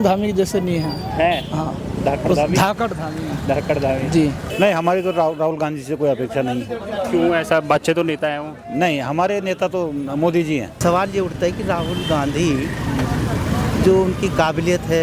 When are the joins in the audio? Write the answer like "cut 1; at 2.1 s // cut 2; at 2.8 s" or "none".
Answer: cut 1; at 4.4 s // cut 2; at 10.7 s

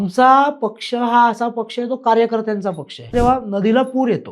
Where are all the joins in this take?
cut 1; at 3.1 s

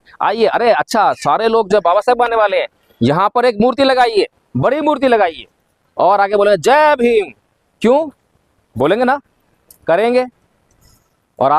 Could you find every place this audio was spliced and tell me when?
none

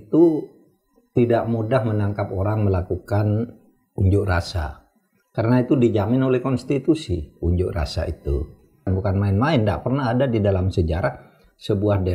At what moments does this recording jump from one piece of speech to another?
cut 1; at 8.9 s

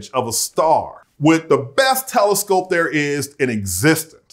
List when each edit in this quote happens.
cut 1; at 1.0 s

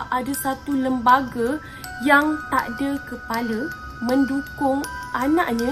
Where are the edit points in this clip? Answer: cut 1; at 3.7 s

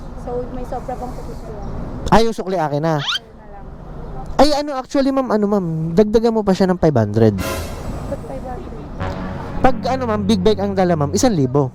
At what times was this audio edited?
none

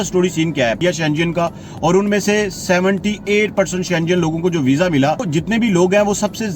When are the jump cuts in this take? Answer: cut 1; at 1.0 s // cut 2; at 5.3 s

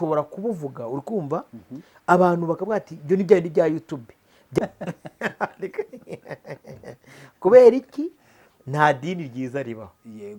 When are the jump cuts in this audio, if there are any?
cut 1; at 4.6 s

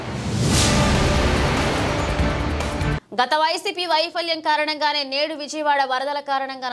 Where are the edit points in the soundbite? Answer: cut 1; at 2.8 s

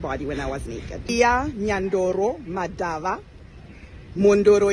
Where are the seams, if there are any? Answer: cut 1; at 1.1 s

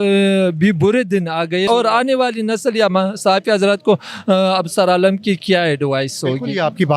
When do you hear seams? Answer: cut 1; at 1.7 s

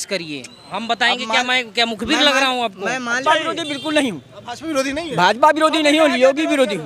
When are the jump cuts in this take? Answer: cut 1; at 3.2 s

